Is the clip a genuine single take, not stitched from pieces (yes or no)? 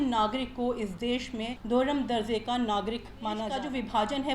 no